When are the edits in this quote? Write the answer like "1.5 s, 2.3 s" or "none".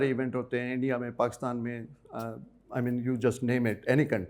none